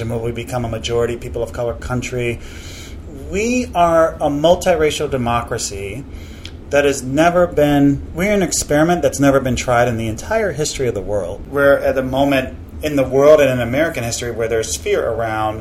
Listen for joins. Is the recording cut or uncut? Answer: cut